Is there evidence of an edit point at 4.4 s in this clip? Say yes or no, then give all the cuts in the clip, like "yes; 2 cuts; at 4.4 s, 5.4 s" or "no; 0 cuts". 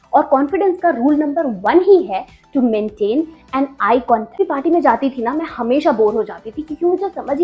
yes; 1 cut; at 4.4 s